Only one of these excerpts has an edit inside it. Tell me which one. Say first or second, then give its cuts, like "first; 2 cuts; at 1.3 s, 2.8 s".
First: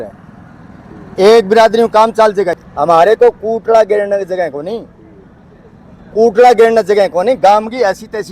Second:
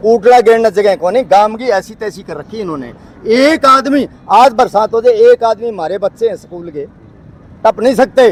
first; 1 cut; at 2.6 s